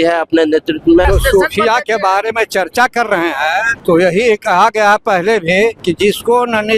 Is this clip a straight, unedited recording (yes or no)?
no